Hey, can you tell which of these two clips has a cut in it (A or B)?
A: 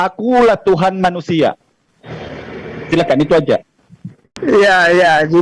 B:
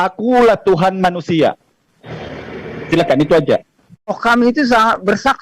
B